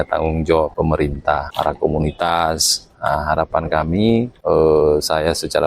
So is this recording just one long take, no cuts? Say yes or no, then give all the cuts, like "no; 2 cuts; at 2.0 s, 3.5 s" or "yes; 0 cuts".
no; 2 cuts; at 1.1 s, 4.3 s